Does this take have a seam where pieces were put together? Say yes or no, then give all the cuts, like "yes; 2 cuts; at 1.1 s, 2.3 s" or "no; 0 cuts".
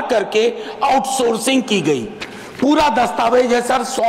no; 0 cuts